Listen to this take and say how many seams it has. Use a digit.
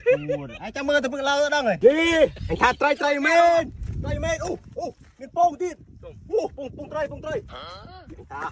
1